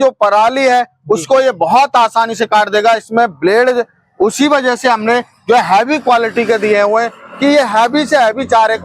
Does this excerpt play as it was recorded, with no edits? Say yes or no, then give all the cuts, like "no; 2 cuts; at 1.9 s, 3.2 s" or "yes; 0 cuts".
yes; 0 cuts